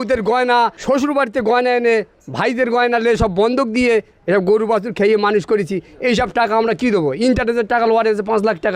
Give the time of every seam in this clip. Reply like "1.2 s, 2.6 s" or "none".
none